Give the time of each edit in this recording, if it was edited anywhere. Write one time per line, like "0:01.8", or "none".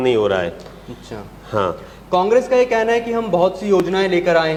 none